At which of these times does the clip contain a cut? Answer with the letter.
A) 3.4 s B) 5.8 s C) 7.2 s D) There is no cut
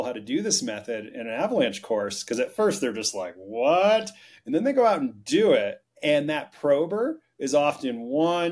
B